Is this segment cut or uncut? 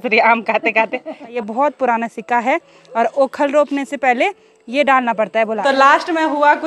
cut